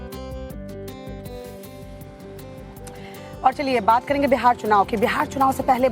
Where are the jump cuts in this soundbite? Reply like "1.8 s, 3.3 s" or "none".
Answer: 2.6 s